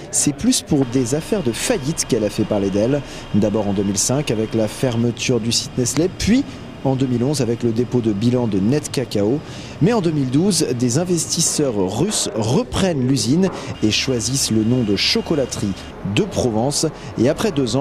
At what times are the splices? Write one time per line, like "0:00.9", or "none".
0:09.1